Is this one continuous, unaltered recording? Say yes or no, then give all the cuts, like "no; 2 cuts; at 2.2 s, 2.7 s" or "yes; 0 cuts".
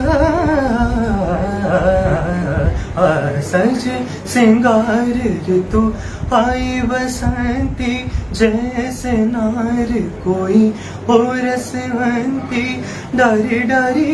yes; 0 cuts